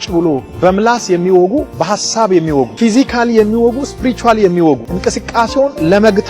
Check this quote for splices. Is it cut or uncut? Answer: cut